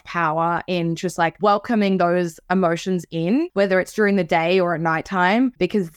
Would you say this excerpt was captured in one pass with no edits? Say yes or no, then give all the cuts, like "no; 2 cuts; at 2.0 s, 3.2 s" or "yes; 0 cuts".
no; 2 cuts; at 1.4 s, 3.5 s